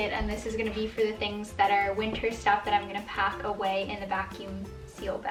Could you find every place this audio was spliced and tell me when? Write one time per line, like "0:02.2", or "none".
none